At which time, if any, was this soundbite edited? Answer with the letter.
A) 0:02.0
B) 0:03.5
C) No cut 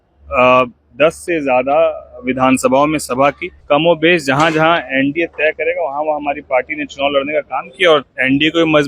B